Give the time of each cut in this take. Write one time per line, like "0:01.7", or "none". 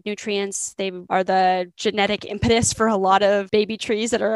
0:01.0
0:01.7
0:03.5